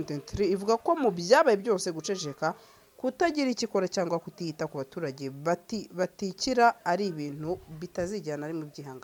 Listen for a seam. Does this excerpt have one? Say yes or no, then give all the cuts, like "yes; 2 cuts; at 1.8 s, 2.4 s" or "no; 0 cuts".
no; 0 cuts